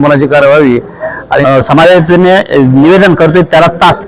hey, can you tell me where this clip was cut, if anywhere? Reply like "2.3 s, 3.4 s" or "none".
1.4 s